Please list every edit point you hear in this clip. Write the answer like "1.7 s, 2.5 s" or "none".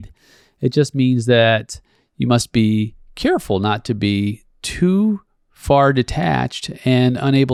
none